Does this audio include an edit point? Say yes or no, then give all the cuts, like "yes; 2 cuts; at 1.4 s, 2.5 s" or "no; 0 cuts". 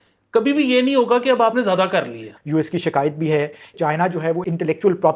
yes; 2 cuts; at 2.3 s, 3.9 s